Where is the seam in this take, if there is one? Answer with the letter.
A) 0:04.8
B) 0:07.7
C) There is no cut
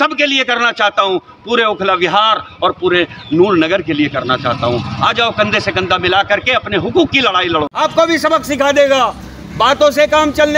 B